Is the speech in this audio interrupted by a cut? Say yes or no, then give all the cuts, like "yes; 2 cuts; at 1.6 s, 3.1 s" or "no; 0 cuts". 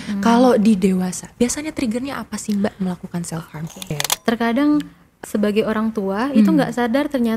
yes; 2 cuts; at 3.9 s, 5.0 s